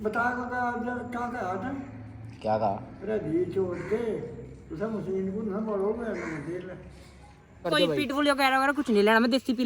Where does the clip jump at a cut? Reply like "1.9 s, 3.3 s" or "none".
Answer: 7.7 s